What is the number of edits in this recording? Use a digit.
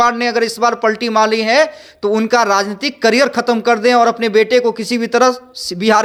0